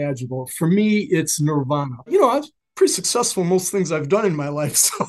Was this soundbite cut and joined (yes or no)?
yes